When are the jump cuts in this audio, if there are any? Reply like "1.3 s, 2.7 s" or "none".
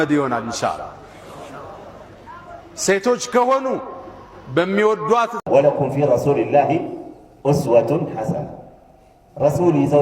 5.4 s